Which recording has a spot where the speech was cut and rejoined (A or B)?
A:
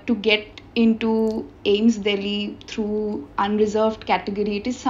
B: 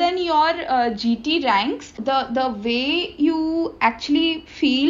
B